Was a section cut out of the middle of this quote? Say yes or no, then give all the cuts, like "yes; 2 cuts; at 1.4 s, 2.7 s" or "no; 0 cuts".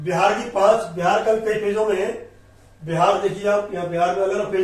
no; 0 cuts